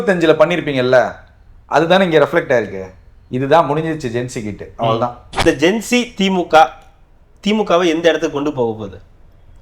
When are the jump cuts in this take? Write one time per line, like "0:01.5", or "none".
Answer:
0:05.4